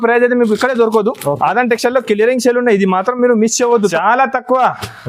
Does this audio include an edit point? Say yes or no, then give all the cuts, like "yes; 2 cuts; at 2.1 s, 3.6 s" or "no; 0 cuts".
yes; 1 cut; at 3.9 s